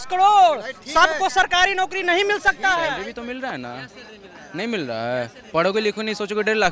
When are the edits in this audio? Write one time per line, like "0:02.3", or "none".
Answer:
0:03.0